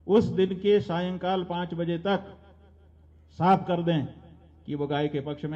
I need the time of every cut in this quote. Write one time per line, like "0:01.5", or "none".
none